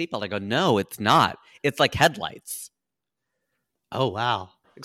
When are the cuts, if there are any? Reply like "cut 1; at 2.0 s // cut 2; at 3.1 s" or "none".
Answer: none